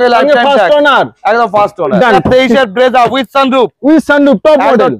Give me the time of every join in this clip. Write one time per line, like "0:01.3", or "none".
0:02.2